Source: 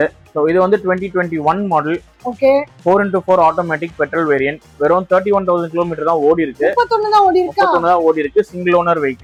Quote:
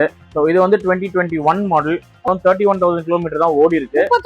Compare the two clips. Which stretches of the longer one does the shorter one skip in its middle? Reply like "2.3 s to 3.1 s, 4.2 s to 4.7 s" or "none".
2.3 s to 4.9 s